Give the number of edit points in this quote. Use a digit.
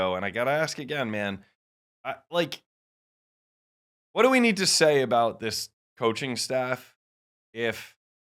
0